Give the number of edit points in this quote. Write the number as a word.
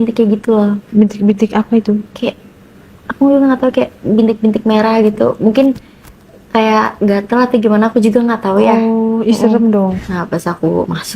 one